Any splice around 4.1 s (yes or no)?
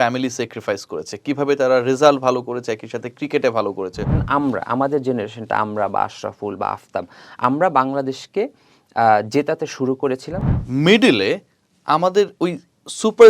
yes